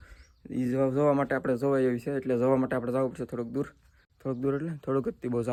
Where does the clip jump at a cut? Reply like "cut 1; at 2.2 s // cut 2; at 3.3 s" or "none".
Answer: none